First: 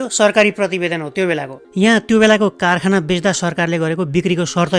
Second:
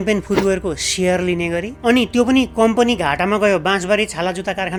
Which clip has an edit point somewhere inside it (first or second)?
first